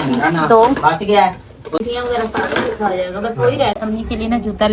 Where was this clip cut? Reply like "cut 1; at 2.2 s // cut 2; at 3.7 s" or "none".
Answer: cut 1; at 1.8 s // cut 2; at 3.8 s